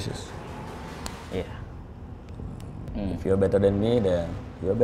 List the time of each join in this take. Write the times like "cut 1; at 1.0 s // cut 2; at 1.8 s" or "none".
cut 1; at 1.2 s // cut 2; at 2.8 s